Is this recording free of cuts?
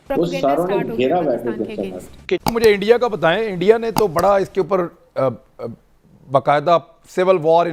no; 1 cut; at 2.4 s

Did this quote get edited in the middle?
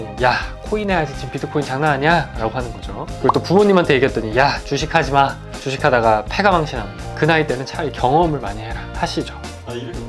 no; 0 cuts

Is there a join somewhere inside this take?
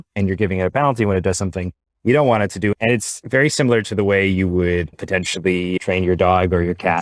yes; 2 cuts; at 3.0 s, 5.8 s

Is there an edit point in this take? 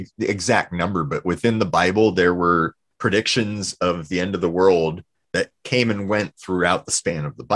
no; 0 cuts

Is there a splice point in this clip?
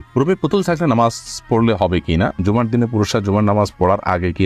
yes; 1 cut; at 2.3 s

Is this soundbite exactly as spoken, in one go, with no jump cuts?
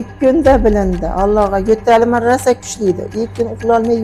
yes; 0 cuts

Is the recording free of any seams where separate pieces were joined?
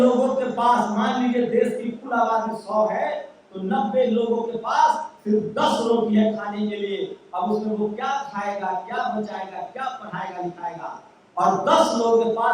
yes; 0 cuts

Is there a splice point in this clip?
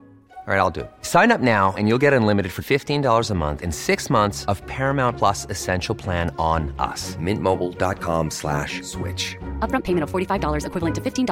no; 0 cuts

